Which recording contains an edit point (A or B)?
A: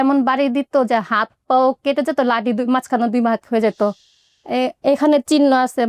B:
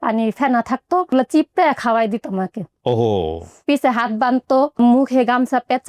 B